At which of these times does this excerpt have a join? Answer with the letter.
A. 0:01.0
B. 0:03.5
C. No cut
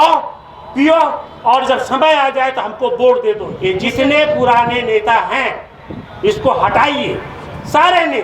B